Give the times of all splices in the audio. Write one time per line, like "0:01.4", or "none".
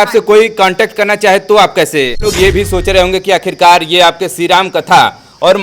0:02.2

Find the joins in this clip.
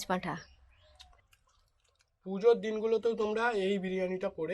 0:01.2

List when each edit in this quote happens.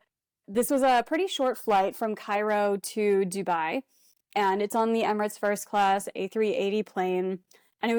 none

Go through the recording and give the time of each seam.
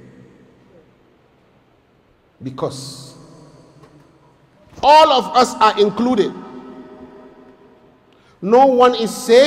none

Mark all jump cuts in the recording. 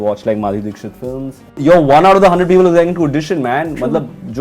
0:01.6

